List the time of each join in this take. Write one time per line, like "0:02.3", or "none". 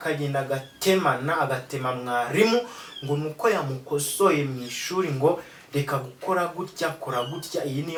none